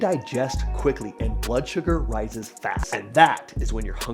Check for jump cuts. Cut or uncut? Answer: cut